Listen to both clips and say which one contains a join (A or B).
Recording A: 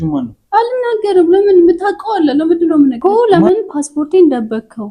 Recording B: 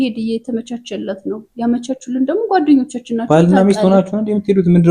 A